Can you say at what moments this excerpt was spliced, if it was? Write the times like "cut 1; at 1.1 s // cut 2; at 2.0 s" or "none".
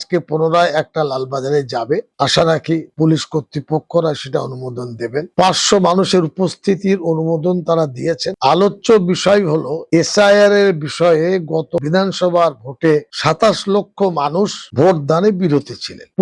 cut 1; at 8.3 s

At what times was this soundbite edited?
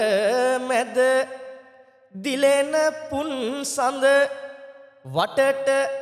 none

